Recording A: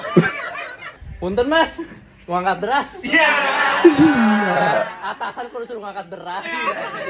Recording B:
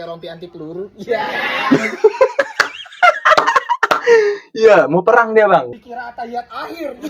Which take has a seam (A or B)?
B